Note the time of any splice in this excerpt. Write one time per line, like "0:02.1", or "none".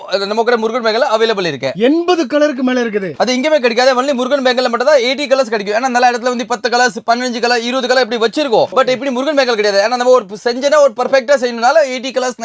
none